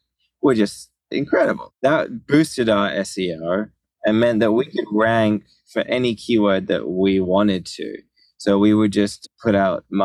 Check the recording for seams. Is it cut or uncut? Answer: cut